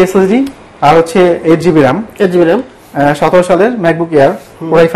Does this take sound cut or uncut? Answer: uncut